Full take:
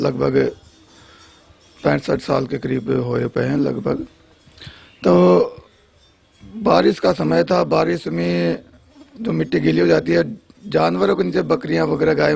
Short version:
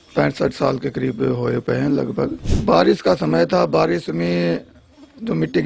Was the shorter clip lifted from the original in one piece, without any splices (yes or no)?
no